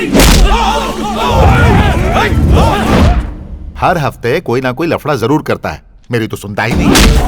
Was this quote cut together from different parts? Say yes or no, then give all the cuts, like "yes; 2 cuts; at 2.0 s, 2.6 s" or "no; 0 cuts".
no; 0 cuts